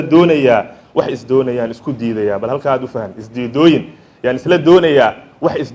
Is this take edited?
no; 0 cuts

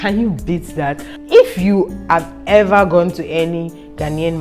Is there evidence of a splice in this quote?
yes; 1 cut; at 1.1 s

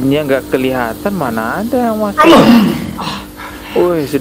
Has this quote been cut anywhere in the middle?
no; 0 cuts

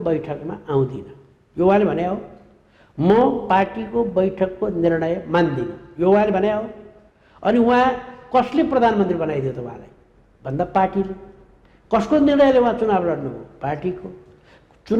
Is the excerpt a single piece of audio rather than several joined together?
yes; 0 cuts

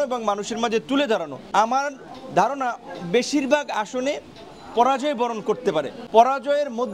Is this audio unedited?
no; 2 cuts; at 1.4 s, 6.0 s

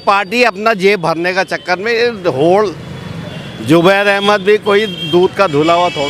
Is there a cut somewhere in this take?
no; 0 cuts

